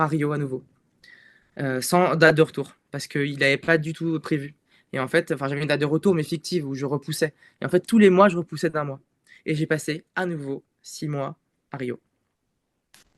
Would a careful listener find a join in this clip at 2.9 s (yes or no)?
no